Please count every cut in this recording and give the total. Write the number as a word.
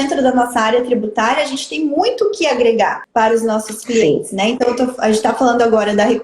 one